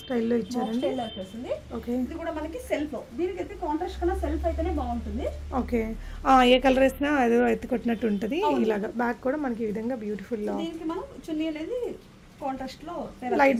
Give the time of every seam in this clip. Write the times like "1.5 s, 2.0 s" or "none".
none